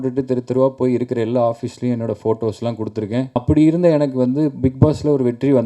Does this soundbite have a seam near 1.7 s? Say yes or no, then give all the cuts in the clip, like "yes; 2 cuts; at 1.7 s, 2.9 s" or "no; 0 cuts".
no; 1 cut; at 3.3 s